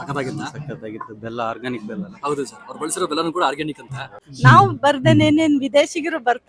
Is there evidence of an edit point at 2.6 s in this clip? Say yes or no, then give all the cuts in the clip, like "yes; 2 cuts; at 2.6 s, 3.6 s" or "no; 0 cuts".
no; 1 cut; at 4.2 s